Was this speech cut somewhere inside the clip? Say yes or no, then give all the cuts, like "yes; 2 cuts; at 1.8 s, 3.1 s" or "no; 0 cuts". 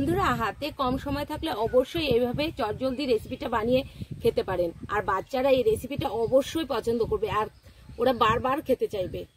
no; 0 cuts